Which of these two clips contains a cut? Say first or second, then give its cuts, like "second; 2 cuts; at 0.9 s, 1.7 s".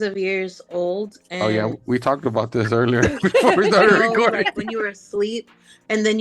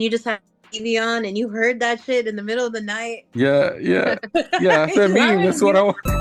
first; 1 cut; at 4.6 s